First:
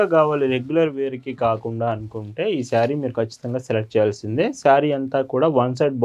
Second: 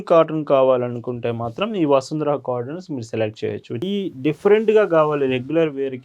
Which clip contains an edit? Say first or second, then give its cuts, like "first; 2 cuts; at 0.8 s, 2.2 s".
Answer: second; 1 cut; at 3.9 s